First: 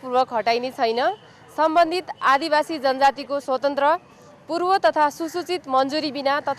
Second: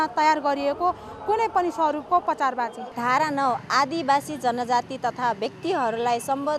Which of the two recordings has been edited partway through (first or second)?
second